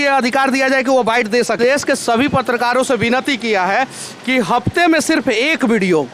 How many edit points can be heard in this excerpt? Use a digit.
1